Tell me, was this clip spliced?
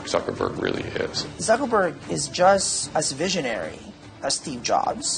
yes; 2 cuts; at 1.2 s, 2.8 s

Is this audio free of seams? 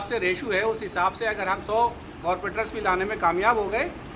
yes; 0 cuts

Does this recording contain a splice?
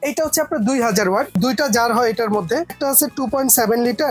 yes; 2 cuts; at 1.3 s, 2.8 s

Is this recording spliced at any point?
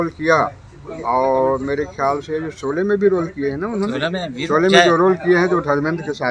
no; 0 cuts

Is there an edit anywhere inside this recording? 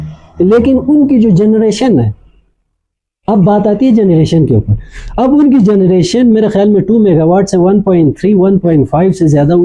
no; 0 cuts

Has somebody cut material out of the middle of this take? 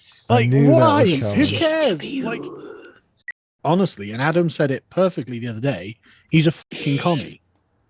yes; 1 cut; at 3.5 s

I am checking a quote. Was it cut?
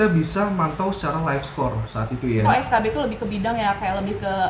yes; 1 cut; at 2.4 s

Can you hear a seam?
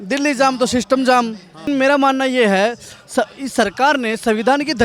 yes; 1 cut; at 1.7 s

